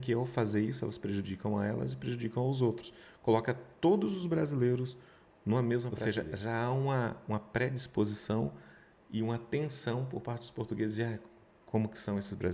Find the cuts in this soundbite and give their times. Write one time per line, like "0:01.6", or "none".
0:06.0